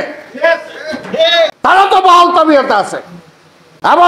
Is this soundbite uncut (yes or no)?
yes